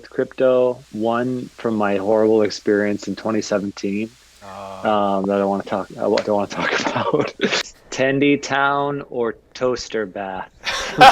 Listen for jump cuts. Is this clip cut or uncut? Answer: cut